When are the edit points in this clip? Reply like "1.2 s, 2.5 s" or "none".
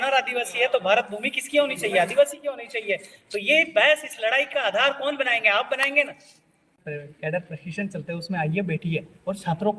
6.8 s